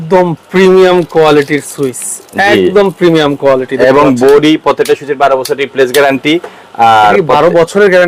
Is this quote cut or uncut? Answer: uncut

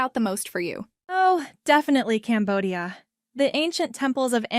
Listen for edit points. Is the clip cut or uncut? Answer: cut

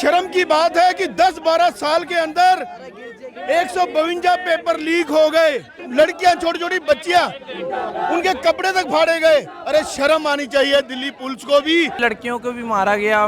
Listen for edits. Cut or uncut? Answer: cut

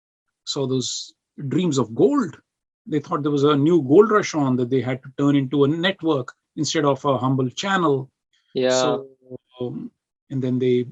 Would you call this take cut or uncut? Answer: uncut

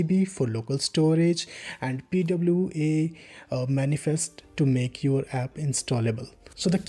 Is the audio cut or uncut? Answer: uncut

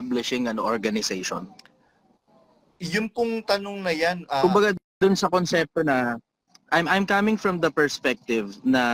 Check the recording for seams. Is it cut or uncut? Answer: uncut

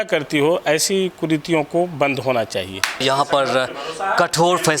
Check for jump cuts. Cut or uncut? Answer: cut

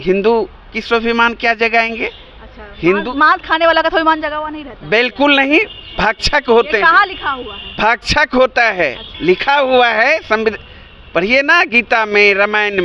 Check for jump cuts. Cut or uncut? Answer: uncut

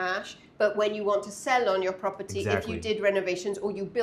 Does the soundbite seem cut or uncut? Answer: uncut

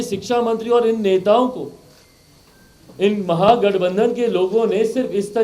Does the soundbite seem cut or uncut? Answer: uncut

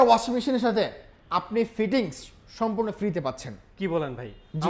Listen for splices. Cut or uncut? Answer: uncut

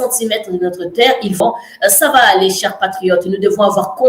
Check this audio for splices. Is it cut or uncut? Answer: cut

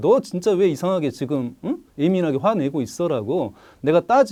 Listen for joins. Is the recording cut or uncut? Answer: uncut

